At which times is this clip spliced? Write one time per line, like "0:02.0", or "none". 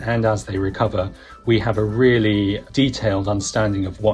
none